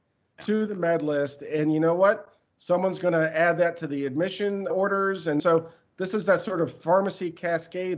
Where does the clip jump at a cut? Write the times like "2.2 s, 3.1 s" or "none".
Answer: 5.4 s